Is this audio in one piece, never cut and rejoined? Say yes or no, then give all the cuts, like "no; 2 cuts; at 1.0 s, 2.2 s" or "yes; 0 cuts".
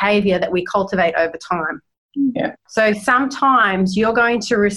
yes; 0 cuts